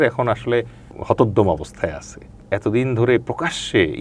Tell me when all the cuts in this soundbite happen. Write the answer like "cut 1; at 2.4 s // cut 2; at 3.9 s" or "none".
cut 1; at 0.9 s // cut 2; at 2.3 s

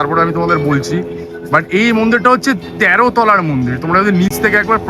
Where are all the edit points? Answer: none

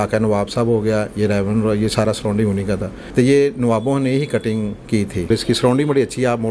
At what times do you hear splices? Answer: cut 1; at 3.0 s // cut 2; at 5.3 s

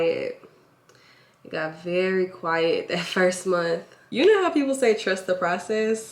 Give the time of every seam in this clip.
cut 1; at 4.0 s

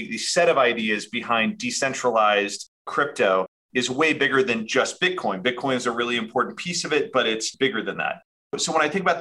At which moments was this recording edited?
none

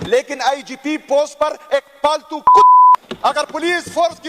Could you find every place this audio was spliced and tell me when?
cut 1; at 3.0 s

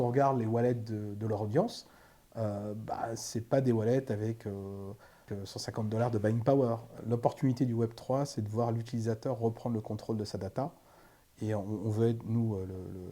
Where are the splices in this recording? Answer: cut 1; at 5.3 s // cut 2; at 7.0 s

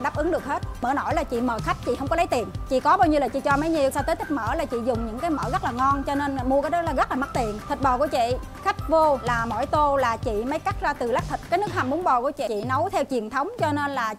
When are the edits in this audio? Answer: cut 1; at 0.8 s // cut 2; at 2.6 s // cut 3; at 3.9 s // cut 4; at 7.6 s // cut 5; at 9.3 s // cut 6; at 11.4 s // cut 7; at 12.5 s

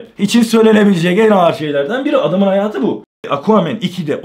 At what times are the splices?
cut 1; at 3.1 s

